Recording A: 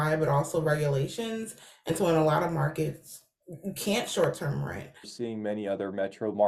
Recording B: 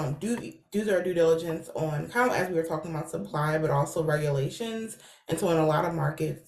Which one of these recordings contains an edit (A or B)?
A